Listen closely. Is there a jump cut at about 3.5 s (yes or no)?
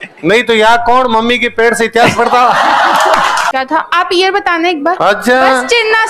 yes